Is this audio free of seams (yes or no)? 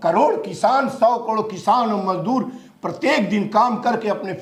yes